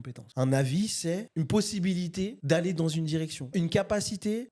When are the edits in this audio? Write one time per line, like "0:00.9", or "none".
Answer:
0:03.5